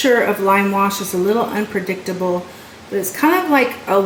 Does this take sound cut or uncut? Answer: uncut